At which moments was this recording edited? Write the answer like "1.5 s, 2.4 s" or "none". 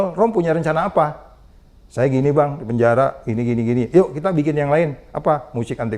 none